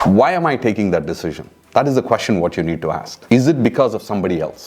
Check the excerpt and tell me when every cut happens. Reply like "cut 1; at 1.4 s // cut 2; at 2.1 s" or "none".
cut 1; at 3.1 s